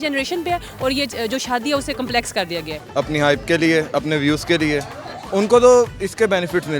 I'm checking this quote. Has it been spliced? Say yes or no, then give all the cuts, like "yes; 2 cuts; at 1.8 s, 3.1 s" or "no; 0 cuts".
yes; 1 cut; at 2.8 s